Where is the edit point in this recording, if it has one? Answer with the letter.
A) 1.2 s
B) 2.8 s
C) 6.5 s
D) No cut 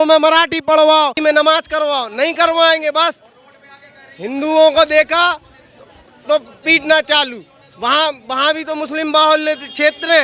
A